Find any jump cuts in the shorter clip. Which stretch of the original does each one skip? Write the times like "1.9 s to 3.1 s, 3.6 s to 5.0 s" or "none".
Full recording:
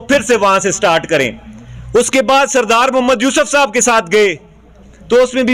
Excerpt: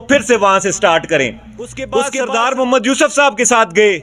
2.1 s to 2.5 s